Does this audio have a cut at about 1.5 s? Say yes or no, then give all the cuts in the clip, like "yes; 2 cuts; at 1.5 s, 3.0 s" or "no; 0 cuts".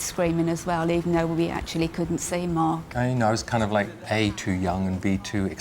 no; 2 cuts; at 2.9 s, 4.0 s